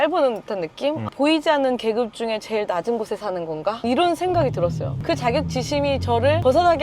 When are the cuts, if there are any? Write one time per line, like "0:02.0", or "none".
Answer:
0:01.1